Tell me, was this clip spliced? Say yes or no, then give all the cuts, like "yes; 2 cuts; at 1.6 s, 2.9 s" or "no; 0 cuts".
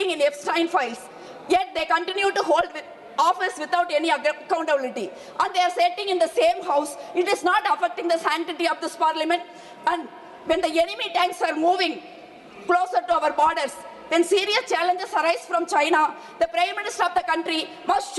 no; 0 cuts